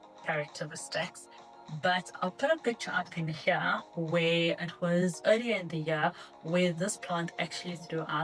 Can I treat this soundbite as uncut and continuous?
yes; 0 cuts

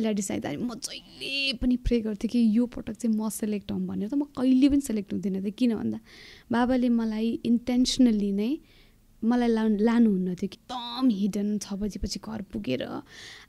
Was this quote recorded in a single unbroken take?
no; 1 cut; at 10.5 s

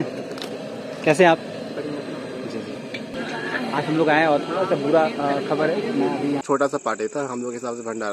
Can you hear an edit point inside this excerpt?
yes; 2 cuts; at 3.2 s, 6.4 s

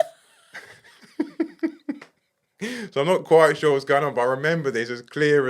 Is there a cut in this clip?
no; 0 cuts

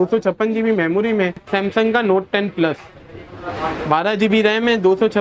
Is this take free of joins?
no; 1 cut; at 1.5 s

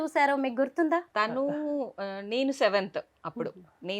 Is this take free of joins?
no; 1 cut; at 1.1 s

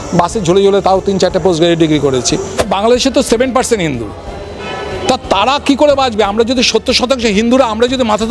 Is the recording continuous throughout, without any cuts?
no; 1 cut; at 2.5 s

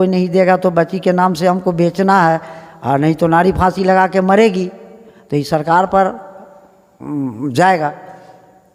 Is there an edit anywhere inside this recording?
no; 0 cuts

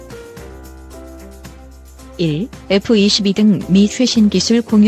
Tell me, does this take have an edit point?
yes; 1 cut; at 2.2 s

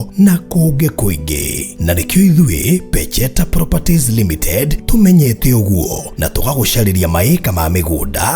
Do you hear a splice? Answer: no; 0 cuts

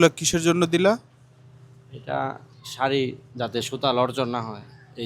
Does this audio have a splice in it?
no; 0 cuts

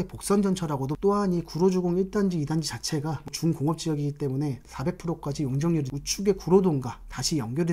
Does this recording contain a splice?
yes; 4 cuts; at 0.9 s, 3.3 s, 4.6 s, 5.9 s

